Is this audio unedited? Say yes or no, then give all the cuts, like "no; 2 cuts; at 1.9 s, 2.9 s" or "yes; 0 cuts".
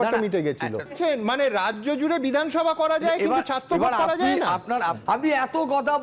no; 2 cuts; at 1.0 s, 5.0 s